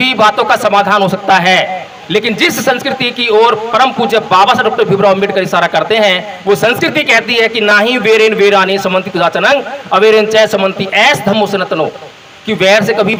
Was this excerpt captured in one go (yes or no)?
yes